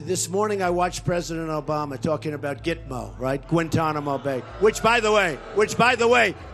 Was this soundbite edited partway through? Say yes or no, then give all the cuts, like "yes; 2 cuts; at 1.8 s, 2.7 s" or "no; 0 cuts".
no; 0 cuts